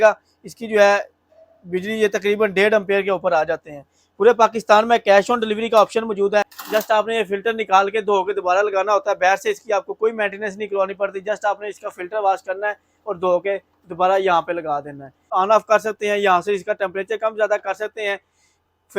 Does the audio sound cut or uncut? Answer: cut